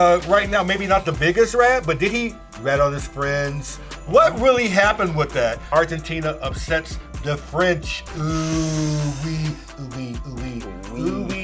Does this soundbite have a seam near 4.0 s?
no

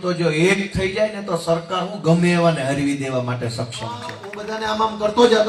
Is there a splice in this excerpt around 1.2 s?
no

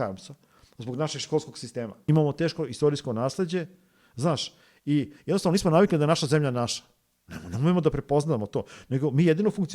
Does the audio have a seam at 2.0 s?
yes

